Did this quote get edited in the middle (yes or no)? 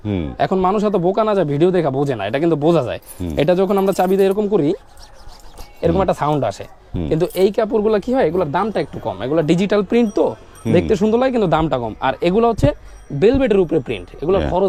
no